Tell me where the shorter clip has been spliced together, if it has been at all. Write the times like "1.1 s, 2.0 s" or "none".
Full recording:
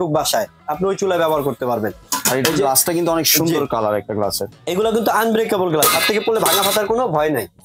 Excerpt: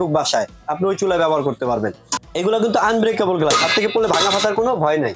2.1 s